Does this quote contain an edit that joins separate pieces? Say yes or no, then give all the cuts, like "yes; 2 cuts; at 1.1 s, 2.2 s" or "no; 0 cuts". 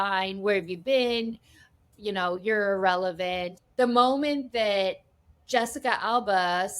yes; 2 cuts; at 1.9 s, 3.6 s